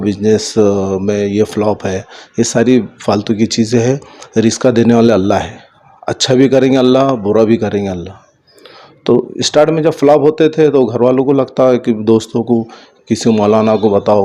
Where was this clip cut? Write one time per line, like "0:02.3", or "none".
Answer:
none